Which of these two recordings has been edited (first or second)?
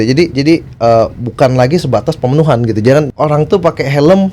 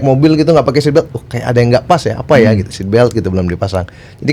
first